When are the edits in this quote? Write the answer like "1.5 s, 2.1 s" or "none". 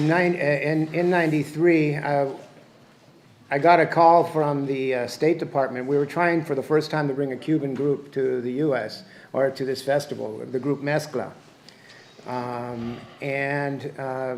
none